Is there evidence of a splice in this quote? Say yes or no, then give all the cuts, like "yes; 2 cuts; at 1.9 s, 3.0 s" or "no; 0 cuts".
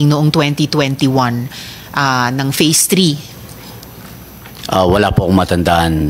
no; 0 cuts